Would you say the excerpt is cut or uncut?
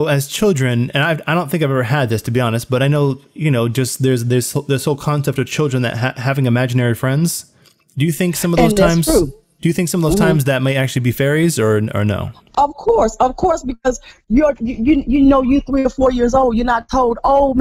uncut